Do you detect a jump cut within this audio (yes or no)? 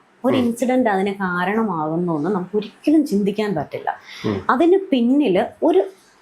no